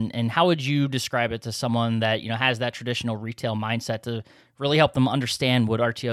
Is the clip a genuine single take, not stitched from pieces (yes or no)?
yes